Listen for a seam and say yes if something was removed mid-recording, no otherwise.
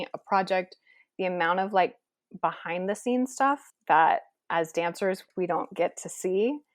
yes